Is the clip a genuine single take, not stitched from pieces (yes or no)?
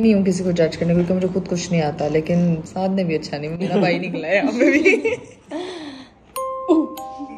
yes